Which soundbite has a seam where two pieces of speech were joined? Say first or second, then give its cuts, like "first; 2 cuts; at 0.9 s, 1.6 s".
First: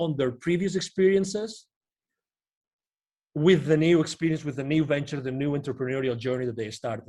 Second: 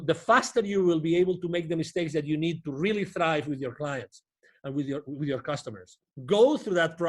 second; 1 cut; at 6.1 s